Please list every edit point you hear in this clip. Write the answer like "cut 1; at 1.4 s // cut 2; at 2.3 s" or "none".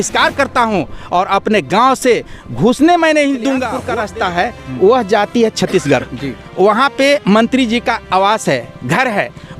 cut 1; at 3.7 s